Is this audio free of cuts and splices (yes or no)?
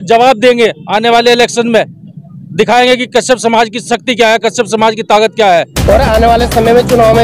no